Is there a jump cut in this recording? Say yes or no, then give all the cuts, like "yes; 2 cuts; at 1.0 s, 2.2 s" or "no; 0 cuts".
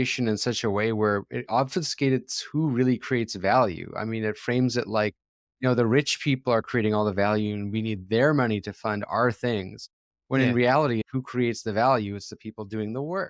yes; 1 cut; at 11.0 s